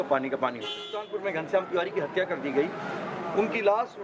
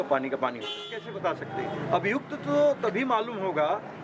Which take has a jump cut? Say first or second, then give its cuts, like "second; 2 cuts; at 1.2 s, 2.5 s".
first; 1 cut; at 1.0 s